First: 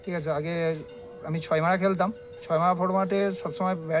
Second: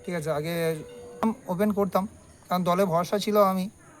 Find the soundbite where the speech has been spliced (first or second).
second